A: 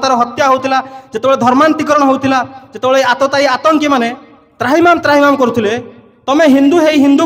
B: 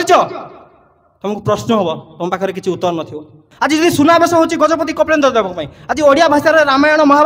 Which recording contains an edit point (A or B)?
B